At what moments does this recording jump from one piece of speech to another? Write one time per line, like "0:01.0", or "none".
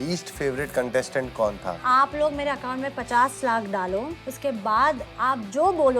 0:01.8
0:04.2